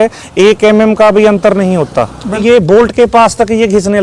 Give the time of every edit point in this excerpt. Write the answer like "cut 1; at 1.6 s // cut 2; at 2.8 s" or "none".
cut 1; at 2.4 s